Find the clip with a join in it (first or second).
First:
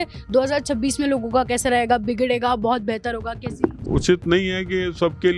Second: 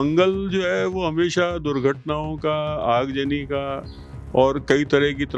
first